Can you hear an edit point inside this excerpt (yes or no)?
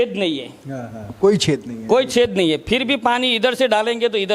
no